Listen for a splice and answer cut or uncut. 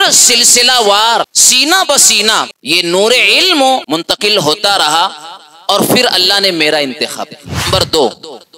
cut